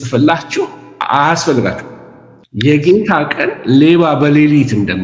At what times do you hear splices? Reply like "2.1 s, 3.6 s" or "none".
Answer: none